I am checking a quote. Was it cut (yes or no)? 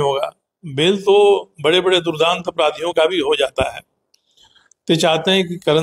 no